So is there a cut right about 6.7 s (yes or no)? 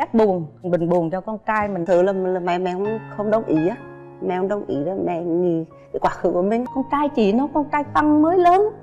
yes